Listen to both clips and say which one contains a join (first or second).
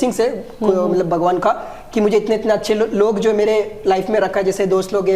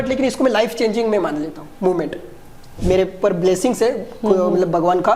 second